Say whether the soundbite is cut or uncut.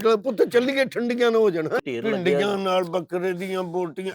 cut